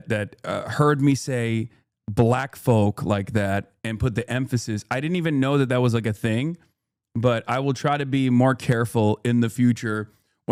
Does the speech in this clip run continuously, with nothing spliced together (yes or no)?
yes